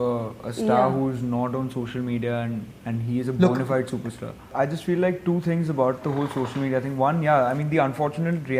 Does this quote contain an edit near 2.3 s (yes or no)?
no